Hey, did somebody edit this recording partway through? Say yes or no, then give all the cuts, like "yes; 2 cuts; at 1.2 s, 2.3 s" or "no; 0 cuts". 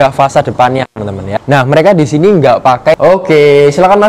yes; 2 cuts; at 1.3 s, 2.9 s